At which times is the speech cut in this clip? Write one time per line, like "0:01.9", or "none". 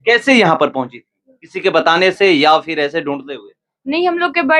none